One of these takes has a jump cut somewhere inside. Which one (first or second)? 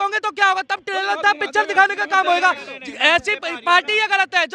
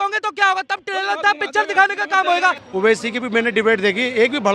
second